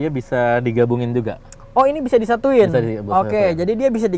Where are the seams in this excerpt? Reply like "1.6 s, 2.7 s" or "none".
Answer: none